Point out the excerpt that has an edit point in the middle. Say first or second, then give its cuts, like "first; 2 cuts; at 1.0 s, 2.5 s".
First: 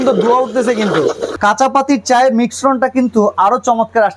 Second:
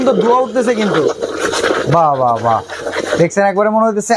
first; 1 cut; at 1.3 s